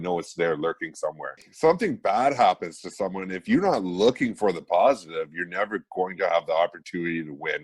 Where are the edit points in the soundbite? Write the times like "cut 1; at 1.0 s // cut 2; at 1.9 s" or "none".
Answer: cut 1; at 1.5 s